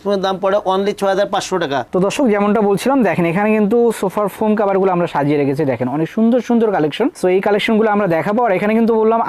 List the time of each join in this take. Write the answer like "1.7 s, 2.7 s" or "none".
1.9 s